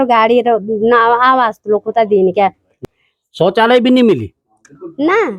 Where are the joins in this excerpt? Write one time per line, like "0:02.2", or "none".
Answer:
0:02.8